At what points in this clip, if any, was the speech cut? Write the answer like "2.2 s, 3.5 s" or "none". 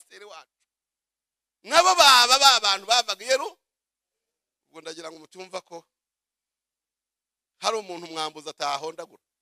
none